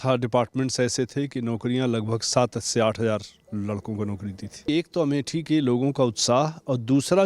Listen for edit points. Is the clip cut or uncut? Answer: cut